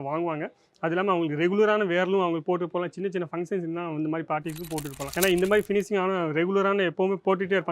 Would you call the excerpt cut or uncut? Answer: cut